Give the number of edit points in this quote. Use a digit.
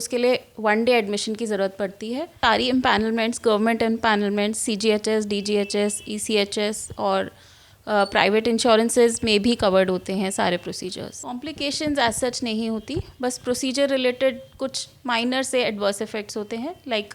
2